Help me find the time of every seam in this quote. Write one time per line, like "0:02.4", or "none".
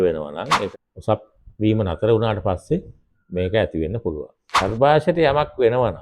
0:00.7
0:04.6